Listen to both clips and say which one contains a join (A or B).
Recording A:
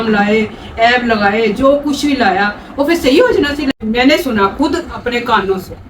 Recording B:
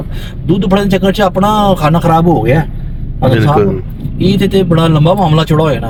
A